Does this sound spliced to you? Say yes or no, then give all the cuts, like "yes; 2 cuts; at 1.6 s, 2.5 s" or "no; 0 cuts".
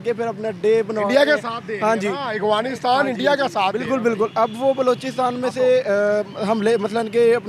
no; 0 cuts